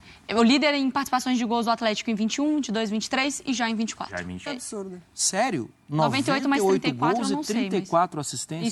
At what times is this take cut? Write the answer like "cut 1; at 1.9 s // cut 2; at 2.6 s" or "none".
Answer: cut 1; at 4.4 s